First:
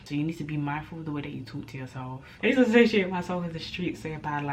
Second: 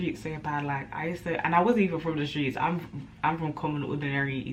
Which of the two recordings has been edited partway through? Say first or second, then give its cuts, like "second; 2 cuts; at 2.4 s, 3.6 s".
first; 1 cut; at 2.2 s